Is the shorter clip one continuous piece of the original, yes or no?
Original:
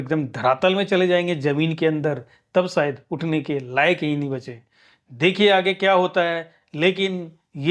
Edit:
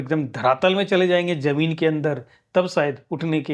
yes